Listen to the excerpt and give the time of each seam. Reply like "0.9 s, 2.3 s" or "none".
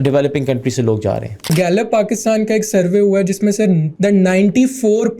1.5 s, 3.9 s